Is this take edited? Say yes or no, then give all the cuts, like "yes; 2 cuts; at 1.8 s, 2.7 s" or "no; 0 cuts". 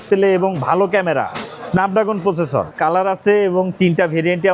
yes; 1 cut; at 2.7 s